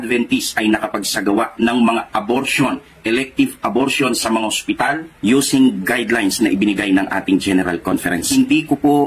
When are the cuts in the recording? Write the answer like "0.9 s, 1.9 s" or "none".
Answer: 3.0 s, 8.2 s